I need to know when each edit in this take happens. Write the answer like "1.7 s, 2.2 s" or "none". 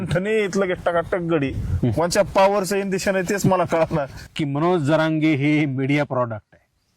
4.1 s